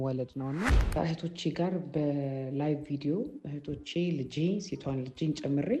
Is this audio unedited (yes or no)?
no